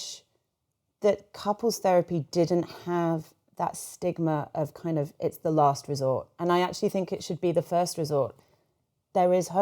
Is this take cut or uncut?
cut